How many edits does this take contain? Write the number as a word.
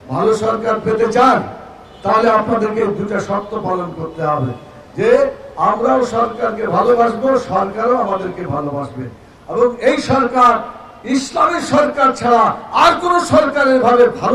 zero